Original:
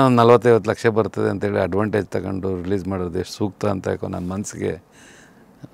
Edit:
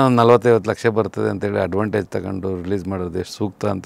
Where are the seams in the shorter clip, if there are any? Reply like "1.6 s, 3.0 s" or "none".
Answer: none